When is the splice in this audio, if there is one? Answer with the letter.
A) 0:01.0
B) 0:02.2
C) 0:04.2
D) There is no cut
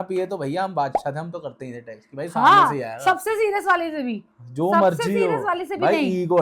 D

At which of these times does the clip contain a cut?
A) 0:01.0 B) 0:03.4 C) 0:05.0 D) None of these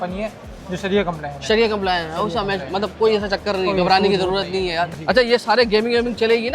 C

